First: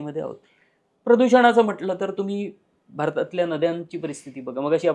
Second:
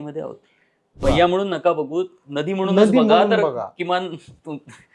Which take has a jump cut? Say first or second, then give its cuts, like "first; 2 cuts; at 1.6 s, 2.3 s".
second; 1 cut; at 1.0 s